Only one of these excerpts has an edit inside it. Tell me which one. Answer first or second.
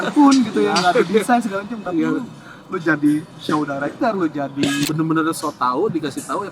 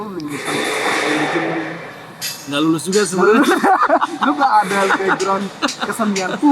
first